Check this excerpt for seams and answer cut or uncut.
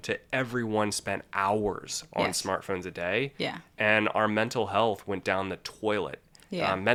uncut